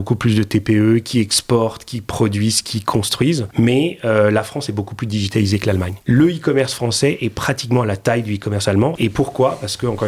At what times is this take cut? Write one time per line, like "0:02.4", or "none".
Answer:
0:03.5
0:05.9
0:08.9